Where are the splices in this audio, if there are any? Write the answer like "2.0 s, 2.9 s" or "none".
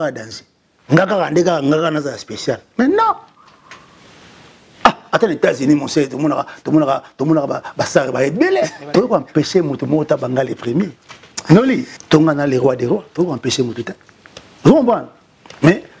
8.8 s, 11.9 s